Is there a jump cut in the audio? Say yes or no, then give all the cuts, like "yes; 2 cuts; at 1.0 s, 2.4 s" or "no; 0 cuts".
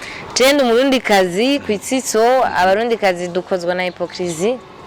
no; 0 cuts